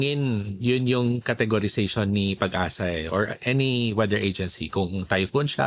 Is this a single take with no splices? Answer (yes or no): yes